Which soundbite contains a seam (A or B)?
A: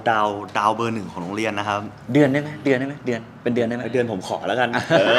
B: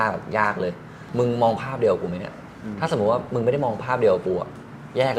B